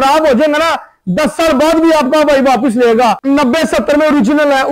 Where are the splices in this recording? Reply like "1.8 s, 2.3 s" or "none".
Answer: 3.2 s